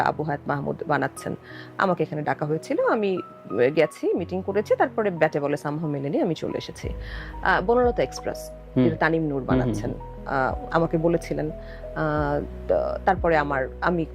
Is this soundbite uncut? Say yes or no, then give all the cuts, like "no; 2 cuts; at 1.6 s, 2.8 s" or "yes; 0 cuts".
yes; 0 cuts